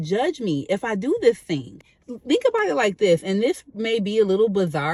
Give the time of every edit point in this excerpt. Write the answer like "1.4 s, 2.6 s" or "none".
none

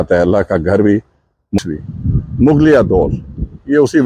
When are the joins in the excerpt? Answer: 1.6 s

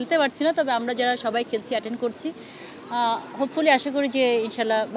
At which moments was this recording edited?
none

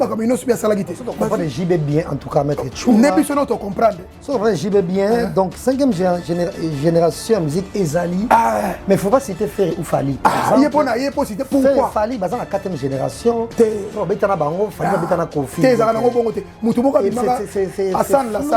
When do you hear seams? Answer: 1.1 s

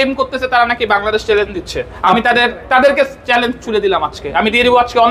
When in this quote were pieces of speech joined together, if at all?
none

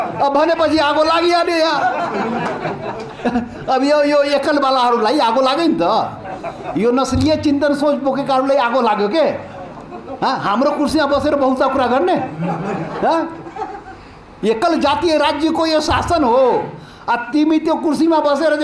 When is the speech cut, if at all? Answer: none

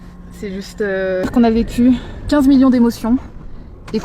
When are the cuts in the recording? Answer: 1.3 s

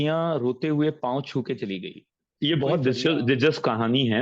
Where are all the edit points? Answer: 2.3 s

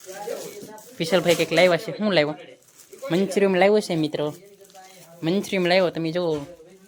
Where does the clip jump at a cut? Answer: none

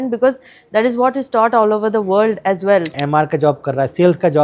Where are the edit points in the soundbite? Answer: 3.0 s

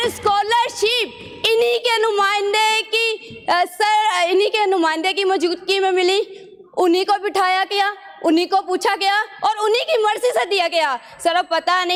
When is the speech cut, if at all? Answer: none

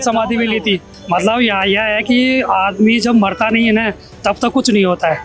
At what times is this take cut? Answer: 0.9 s

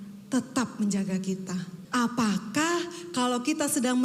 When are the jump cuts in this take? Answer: 1.8 s

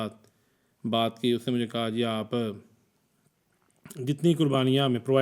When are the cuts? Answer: none

